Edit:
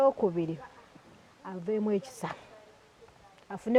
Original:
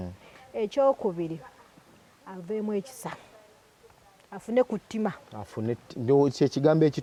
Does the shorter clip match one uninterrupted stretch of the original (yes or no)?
yes